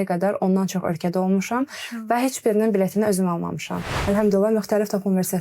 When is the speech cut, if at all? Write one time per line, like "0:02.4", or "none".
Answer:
0:03.9